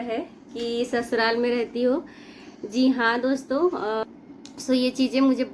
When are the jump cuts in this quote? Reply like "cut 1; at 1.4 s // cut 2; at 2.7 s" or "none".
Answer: cut 1; at 4.0 s